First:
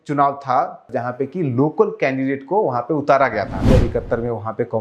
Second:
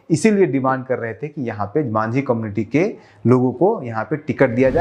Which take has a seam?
first; 2 cuts; at 0.9 s, 3.7 s

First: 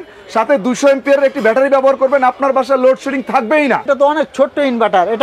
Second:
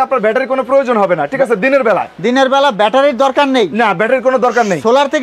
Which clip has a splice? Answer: first; 1 cut; at 3.9 s

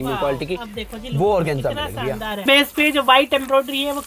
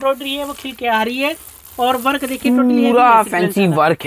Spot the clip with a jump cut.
first; 1 cut; at 2.4 s

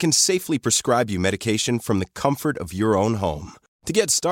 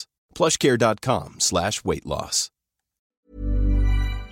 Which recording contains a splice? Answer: second; 1 cut; at 3.2 s

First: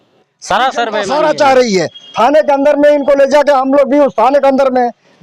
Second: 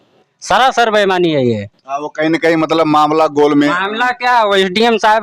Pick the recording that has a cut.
first; 1 cut; at 1.1 s

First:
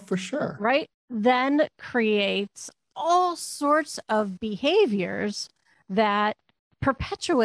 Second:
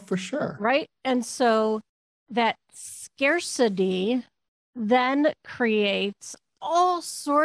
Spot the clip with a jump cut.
first; 1 cut; at 0.9 s

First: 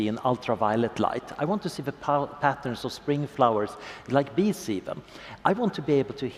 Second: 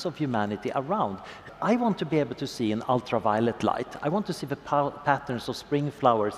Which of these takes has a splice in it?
second; 1 cut; at 1.5 s

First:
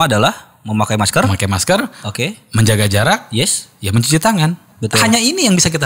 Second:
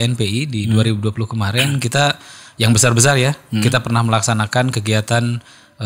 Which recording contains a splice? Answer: first; 1 cut; at 4.7 s

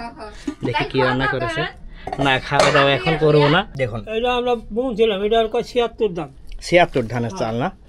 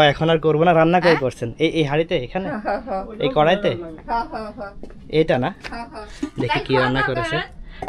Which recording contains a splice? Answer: first; 1 cut; at 3.7 s

